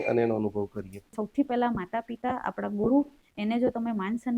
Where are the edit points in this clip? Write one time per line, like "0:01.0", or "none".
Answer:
0:01.1